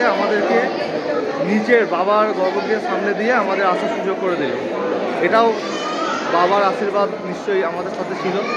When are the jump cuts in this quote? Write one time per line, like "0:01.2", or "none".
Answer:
none